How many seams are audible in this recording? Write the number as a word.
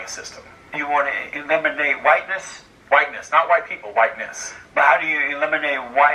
one